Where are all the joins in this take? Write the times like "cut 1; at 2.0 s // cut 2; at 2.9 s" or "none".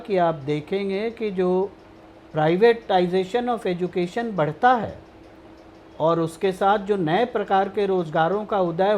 none